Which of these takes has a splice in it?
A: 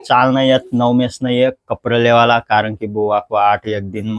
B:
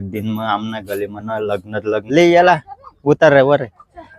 B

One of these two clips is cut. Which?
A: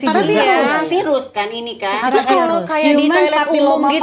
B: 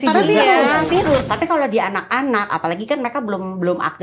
B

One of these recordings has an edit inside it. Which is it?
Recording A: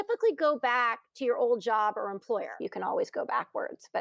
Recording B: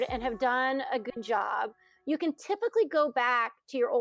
A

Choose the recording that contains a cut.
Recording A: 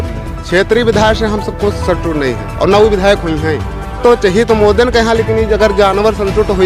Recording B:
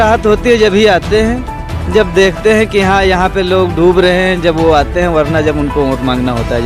A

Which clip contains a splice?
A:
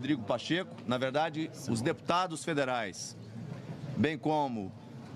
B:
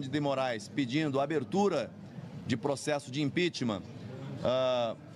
B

